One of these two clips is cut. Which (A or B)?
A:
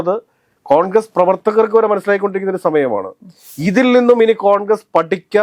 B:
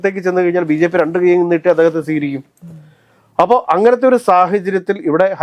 A